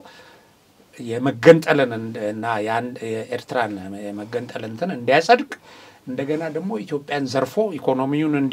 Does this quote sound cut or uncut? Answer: uncut